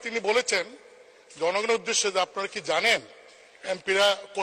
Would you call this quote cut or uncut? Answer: uncut